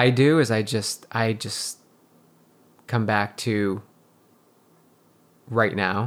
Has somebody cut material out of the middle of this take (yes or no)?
yes